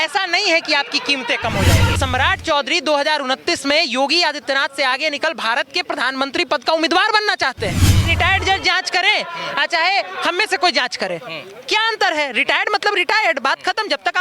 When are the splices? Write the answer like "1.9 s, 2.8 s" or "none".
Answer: 1.9 s, 8.1 s